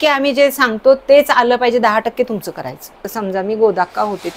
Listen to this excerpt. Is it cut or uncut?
cut